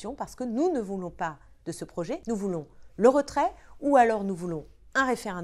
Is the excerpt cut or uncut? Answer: cut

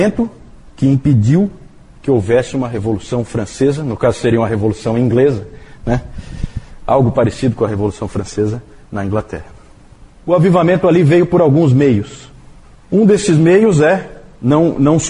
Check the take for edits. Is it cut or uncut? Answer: cut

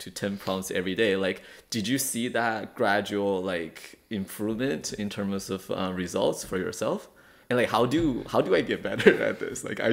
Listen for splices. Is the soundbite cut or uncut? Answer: uncut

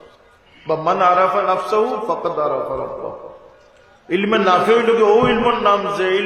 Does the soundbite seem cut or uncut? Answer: uncut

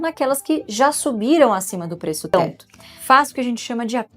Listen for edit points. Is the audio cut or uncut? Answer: cut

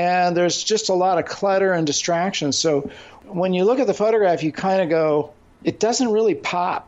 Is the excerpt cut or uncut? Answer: cut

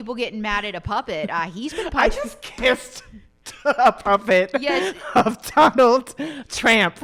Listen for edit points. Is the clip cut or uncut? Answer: uncut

